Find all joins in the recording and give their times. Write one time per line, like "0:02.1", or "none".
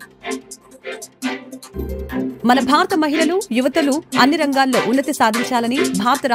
0:01.6